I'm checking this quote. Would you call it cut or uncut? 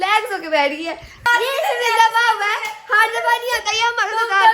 cut